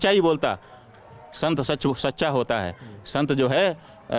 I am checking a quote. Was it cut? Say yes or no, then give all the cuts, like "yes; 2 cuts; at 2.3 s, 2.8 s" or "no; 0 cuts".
no; 0 cuts